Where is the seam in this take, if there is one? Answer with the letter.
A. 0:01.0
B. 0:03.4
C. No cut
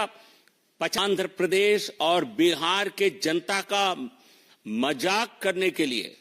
A